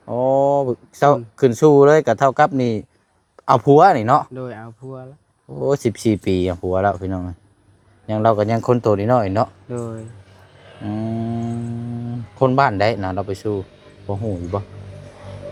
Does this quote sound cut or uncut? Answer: uncut